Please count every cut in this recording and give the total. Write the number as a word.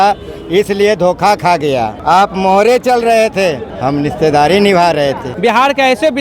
three